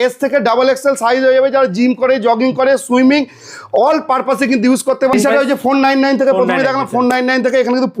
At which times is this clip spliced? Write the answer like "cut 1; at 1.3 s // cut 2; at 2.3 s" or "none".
cut 1; at 5.1 s